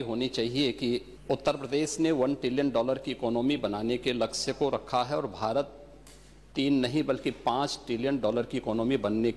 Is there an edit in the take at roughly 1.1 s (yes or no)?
yes